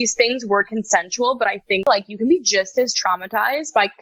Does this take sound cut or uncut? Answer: cut